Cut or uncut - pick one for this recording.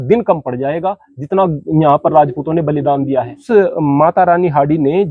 cut